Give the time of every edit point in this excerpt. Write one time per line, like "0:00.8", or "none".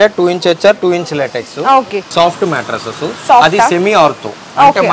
0:02.1